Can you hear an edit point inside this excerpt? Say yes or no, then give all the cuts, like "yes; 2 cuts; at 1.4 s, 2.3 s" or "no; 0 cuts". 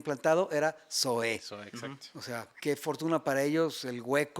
yes; 1 cut; at 2.6 s